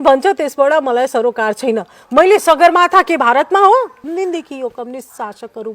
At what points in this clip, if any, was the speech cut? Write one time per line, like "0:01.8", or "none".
0:04.0